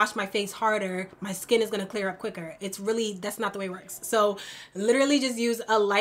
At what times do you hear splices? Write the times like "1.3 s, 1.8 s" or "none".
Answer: none